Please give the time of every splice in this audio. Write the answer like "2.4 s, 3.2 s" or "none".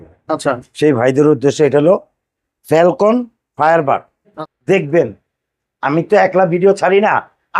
4.5 s